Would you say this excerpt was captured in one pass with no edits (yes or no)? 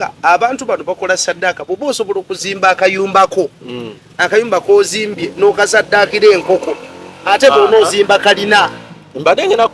yes